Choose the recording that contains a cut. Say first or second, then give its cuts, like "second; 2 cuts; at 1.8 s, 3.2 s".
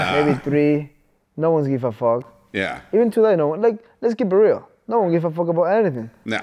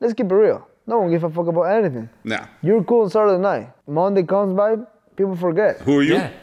second; 1 cut; at 3.8 s